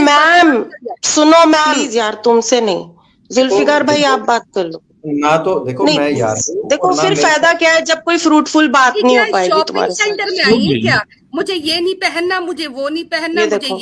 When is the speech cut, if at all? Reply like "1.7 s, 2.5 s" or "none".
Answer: 1.9 s